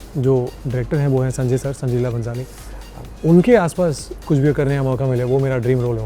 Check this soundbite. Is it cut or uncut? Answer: uncut